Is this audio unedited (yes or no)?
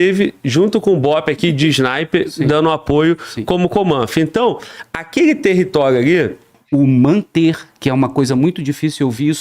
no